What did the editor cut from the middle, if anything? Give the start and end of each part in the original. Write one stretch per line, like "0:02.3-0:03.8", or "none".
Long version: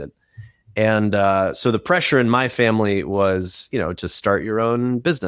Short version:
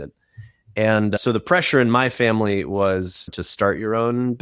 0:01.2-0:01.5
0:03.7-0:03.9